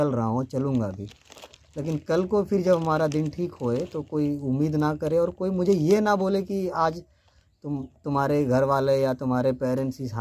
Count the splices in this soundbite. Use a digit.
0